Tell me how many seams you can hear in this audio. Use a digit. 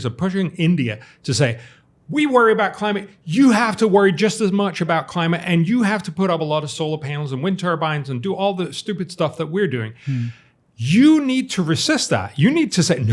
0